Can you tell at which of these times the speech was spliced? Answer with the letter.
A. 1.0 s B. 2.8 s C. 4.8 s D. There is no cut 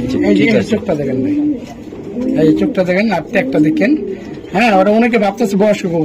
D